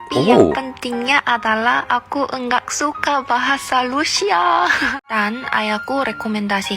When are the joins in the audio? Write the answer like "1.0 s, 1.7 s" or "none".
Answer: 4.9 s